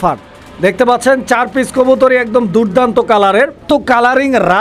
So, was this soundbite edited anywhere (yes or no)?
yes